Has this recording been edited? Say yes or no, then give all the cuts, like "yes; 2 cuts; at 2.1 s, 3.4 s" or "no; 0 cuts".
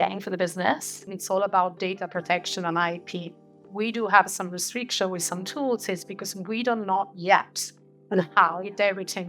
yes; 1 cut; at 1.1 s